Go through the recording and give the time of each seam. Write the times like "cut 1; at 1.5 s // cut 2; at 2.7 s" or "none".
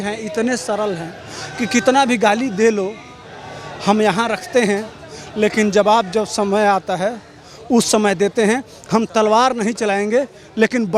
none